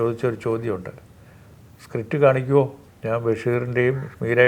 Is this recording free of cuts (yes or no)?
no